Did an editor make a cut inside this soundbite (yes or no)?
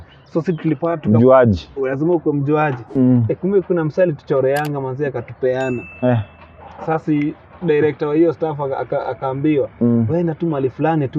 yes